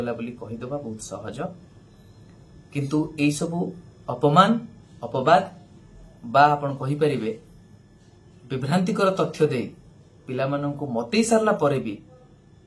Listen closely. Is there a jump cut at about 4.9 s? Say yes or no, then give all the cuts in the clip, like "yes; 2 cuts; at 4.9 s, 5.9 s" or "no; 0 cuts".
no; 0 cuts